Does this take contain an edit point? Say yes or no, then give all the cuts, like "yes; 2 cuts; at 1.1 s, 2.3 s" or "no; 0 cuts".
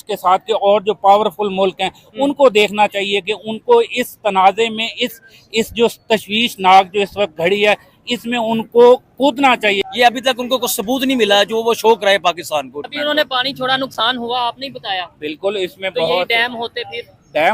yes; 2 cuts; at 9.9 s, 12.9 s